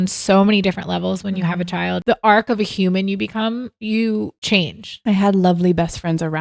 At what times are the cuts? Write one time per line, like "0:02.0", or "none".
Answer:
0:02.0
0:03.8
0:04.9